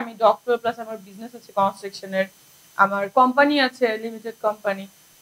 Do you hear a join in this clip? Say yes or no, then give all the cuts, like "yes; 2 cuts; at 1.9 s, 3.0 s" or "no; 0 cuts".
no; 0 cuts